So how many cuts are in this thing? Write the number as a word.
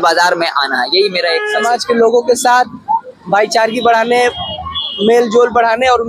one